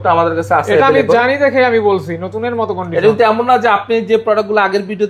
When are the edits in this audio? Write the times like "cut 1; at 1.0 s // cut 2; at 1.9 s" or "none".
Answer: none

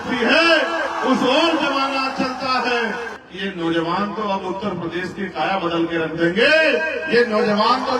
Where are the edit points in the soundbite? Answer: cut 1; at 3.2 s

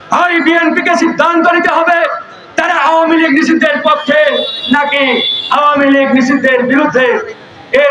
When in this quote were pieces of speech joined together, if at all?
none

